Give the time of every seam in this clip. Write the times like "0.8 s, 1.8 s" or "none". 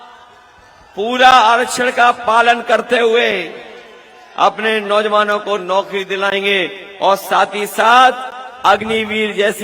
none